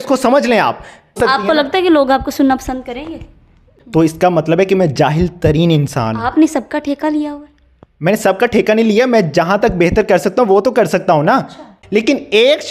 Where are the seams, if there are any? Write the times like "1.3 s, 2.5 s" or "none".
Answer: 1.2 s, 3.7 s, 11.8 s